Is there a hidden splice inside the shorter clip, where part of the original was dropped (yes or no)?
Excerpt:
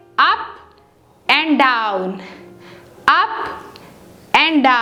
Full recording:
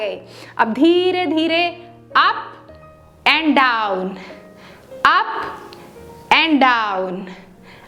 no